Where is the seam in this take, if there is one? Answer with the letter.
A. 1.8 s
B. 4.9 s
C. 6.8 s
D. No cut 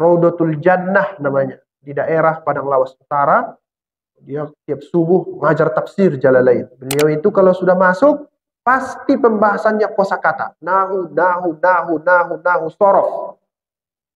C